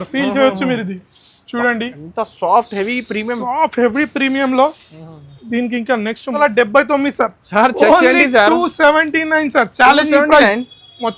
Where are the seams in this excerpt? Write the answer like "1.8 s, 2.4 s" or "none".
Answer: 6.4 s